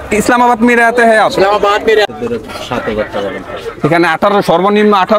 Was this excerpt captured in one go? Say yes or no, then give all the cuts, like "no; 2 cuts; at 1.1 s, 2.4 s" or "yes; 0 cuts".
no; 1 cut; at 2.1 s